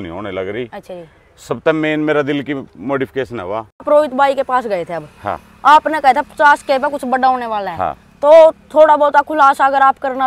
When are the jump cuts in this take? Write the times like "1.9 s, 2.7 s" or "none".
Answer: 3.8 s